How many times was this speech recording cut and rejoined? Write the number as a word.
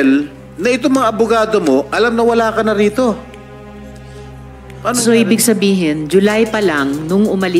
two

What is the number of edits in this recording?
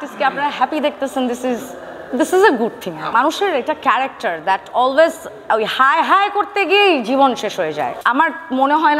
two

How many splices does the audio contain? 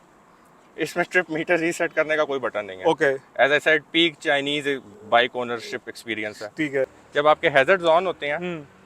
one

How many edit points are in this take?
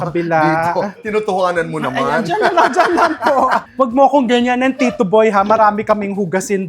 one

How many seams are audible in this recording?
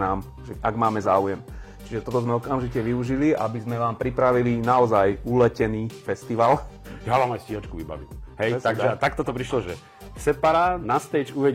one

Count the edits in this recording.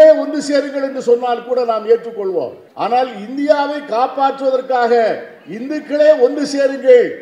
one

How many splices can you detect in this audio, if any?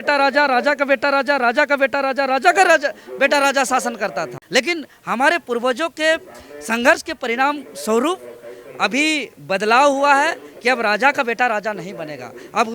one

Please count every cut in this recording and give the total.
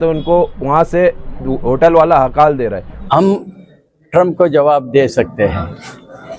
one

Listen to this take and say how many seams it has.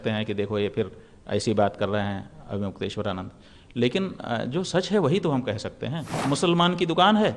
one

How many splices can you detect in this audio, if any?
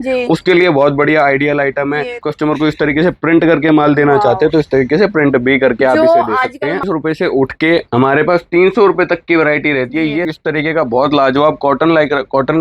three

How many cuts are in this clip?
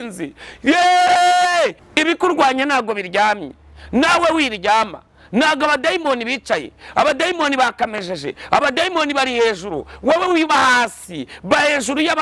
one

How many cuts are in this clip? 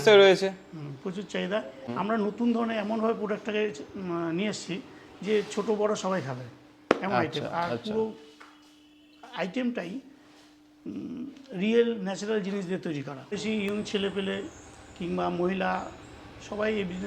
two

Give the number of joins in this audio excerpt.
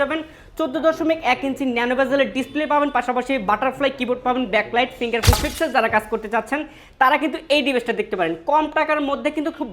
one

